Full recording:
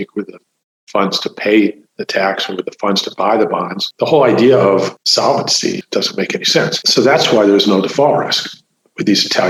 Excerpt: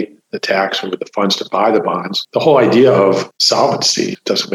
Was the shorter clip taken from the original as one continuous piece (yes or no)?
yes